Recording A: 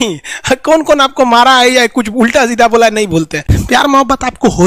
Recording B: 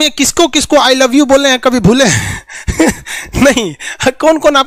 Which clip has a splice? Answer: A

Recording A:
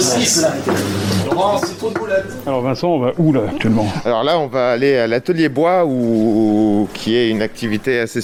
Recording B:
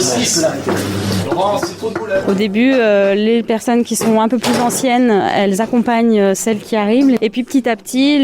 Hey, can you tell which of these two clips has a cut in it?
B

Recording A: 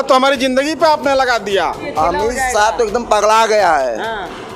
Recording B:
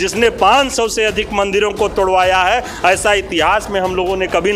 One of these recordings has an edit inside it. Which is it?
A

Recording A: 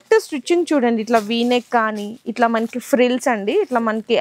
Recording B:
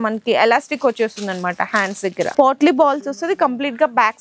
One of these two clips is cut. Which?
B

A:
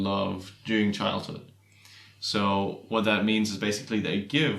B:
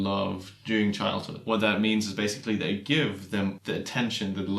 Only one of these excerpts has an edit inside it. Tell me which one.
B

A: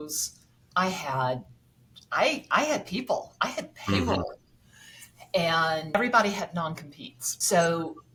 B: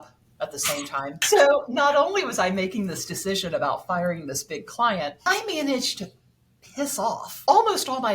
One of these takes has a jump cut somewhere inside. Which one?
B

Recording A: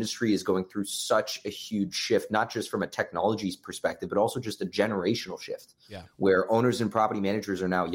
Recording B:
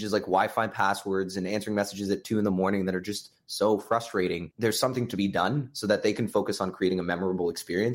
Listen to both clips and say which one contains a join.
B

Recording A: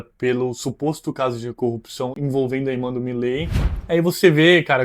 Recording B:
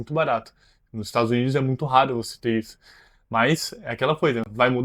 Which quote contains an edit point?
A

